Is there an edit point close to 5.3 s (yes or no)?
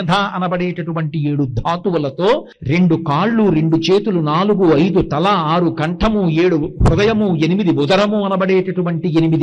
no